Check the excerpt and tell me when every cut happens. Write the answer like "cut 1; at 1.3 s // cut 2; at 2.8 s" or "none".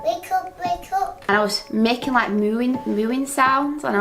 cut 1; at 1.3 s